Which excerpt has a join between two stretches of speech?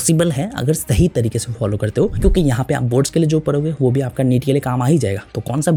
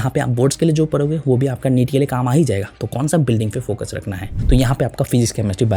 second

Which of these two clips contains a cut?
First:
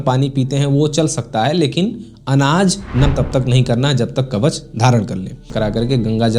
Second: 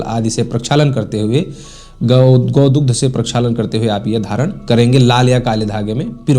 first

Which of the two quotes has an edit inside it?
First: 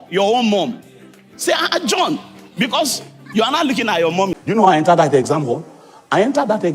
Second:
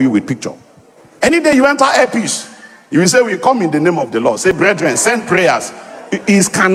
first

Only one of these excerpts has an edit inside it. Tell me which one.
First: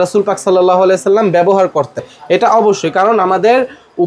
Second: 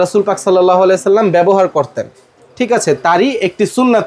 first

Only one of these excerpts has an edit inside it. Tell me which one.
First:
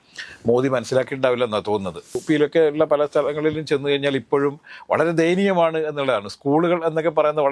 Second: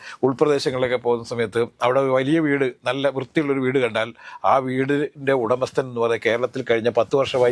first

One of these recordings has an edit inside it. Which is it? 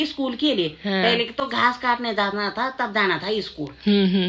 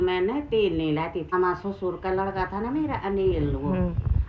second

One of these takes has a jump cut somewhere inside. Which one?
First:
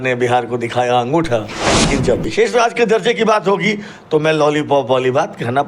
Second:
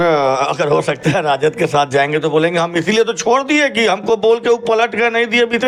first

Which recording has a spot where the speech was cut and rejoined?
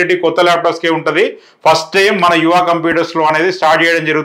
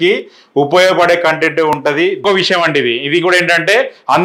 second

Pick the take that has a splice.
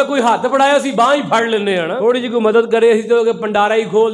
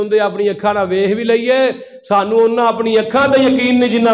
first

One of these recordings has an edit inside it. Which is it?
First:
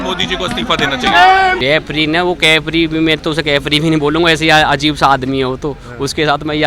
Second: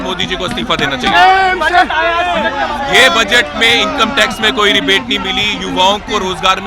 first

